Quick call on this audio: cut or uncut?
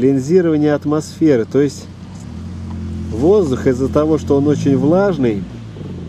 uncut